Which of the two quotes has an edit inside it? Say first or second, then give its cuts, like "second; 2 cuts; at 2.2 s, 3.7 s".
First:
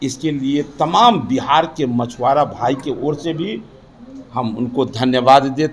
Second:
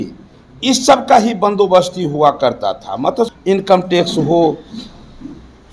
second; 1 cut; at 3.3 s